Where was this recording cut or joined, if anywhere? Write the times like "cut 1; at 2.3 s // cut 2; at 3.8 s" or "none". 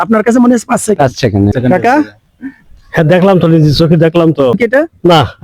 cut 1; at 1.5 s // cut 2; at 4.6 s